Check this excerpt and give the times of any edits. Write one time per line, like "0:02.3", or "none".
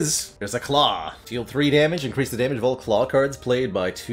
none